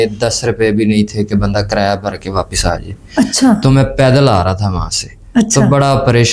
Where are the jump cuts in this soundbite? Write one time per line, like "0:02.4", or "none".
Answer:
none